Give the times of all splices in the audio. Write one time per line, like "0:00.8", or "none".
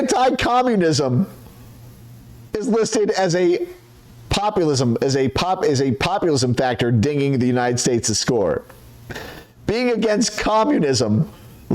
none